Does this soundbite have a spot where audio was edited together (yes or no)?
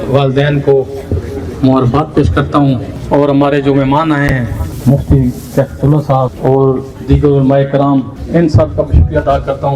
yes